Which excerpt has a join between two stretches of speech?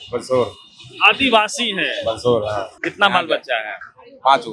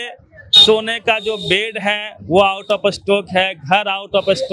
first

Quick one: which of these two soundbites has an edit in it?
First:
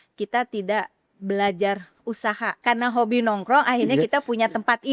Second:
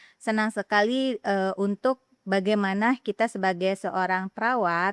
first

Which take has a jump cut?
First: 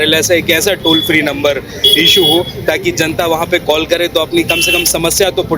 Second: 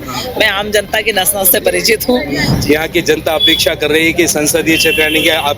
second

